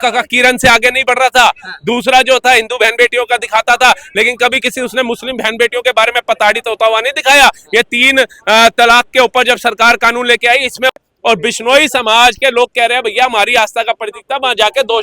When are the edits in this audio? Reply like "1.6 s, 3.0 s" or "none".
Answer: 10.9 s